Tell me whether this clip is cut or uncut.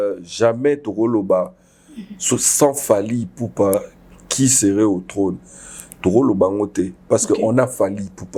uncut